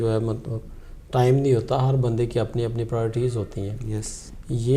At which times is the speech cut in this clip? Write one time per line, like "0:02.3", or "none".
none